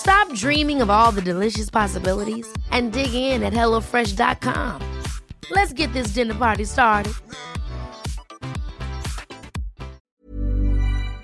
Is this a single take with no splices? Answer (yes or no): no